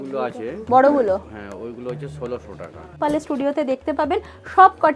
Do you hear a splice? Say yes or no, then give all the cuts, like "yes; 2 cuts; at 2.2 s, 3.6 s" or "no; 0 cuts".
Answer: yes; 1 cut; at 3.0 s